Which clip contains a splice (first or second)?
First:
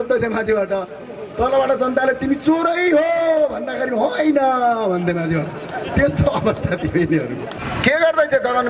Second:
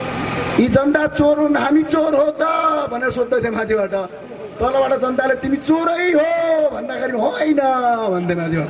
first